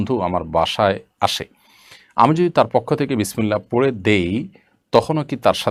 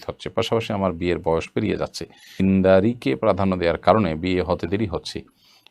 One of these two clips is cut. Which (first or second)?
second